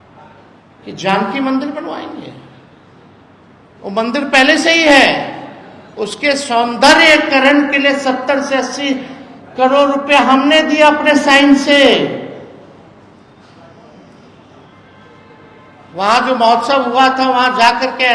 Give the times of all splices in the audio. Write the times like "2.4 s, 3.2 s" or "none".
none